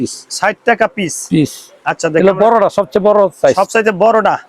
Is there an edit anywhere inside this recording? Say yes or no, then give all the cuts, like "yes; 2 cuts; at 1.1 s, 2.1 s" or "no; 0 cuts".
no; 0 cuts